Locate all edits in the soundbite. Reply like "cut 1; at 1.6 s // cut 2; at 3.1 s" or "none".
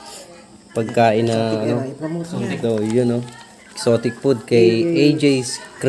none